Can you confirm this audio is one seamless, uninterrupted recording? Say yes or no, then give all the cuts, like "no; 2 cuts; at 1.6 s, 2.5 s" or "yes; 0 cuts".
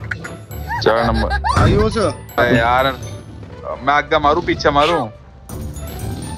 no; 1 cut; at 2.4 s